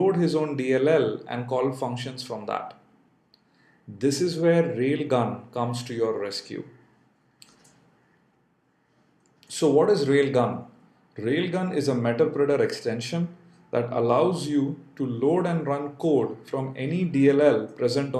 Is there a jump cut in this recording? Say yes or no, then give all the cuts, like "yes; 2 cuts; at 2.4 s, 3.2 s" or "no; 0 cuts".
no; 0 cuts